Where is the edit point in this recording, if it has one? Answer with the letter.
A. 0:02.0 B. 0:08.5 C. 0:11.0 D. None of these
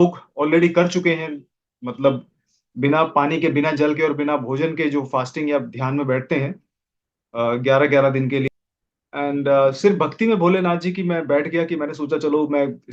B